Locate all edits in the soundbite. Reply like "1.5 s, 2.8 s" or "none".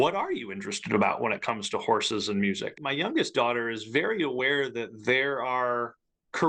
2.8 s